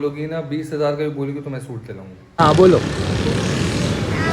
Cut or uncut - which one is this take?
cut